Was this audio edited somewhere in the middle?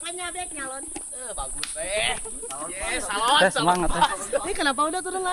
no; 0 cuts

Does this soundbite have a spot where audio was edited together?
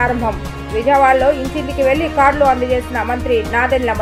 no; 0 cuts

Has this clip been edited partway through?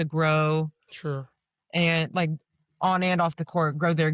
no; 0 cuts

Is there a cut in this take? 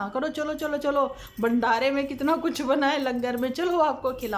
no; 0 cuts

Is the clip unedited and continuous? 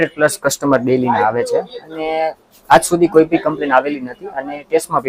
yes; 0 cuts

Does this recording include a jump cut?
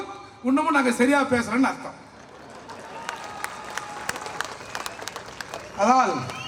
no; 0 cuts

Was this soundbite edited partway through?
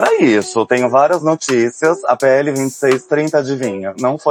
no; 0 cuts

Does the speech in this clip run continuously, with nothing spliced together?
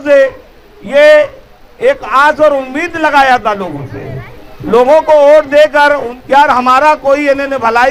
no; 1 cut; at 6.1 s

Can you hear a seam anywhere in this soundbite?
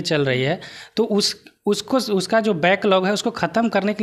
no; 0 cuts

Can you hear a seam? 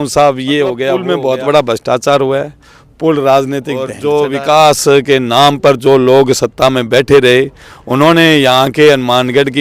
yes; 2 cuts; at 1.1 s, 4.0 s

